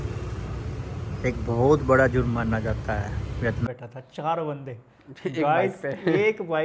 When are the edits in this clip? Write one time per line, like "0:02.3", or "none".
0:03.7